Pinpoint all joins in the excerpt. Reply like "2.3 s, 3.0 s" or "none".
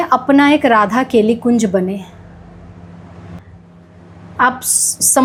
none